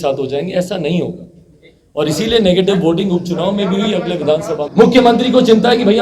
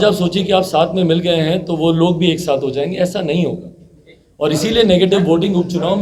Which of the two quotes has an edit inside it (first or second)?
first